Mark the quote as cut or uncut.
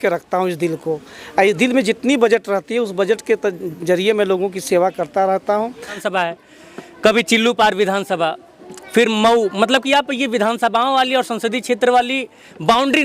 cut